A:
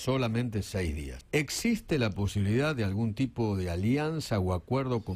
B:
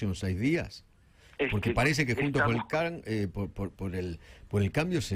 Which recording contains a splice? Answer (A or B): A